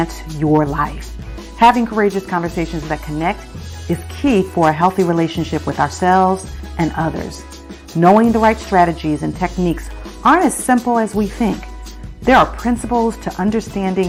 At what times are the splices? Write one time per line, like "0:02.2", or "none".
none